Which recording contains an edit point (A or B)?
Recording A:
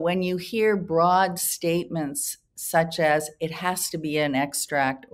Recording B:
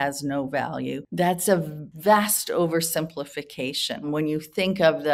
B